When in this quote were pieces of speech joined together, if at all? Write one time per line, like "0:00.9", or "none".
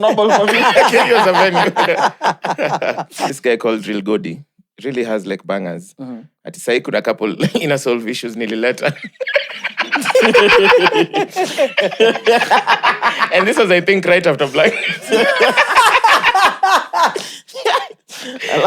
0:03.3